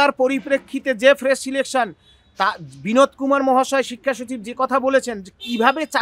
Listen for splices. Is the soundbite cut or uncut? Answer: uncut